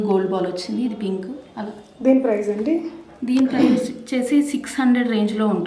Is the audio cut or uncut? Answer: uncut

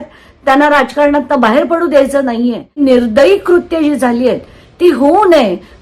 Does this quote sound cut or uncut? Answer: cut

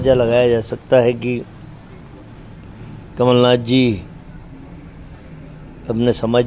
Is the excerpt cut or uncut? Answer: cut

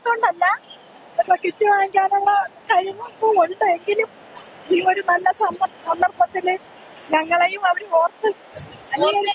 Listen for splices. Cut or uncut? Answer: uncut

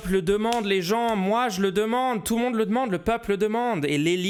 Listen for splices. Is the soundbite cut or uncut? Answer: uncut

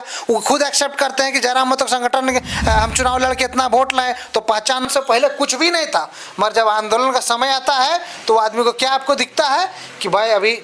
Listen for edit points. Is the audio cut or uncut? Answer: cut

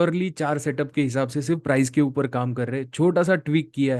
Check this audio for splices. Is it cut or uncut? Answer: uncut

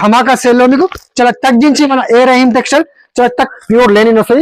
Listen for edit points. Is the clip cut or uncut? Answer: cut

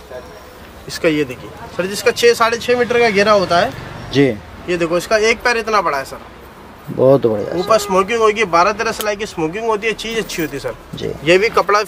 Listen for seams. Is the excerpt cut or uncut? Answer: uncut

